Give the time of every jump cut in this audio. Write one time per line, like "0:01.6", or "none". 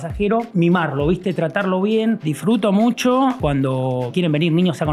0:02.2
0:04.0